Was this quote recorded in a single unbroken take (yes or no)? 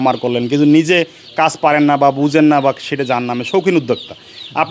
yes